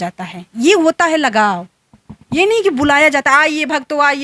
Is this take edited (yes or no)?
no